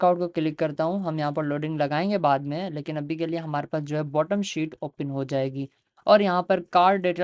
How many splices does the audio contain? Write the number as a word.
zero